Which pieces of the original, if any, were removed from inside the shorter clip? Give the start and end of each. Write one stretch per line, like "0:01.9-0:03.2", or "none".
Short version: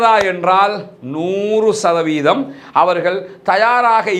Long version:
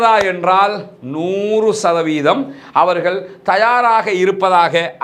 none